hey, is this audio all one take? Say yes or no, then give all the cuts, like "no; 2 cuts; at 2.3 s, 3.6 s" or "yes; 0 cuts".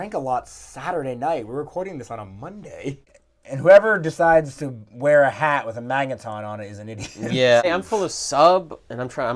no; 2 cuts; at 3.1 s, 7.6 s